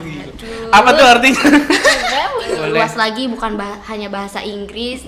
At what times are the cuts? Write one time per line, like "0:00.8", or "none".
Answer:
0:02.6